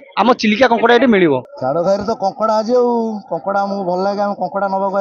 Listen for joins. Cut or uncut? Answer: cut